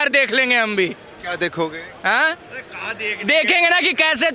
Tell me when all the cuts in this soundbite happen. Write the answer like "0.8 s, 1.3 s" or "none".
none